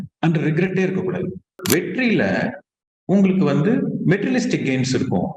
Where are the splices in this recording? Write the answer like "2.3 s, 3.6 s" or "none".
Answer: 1.6 s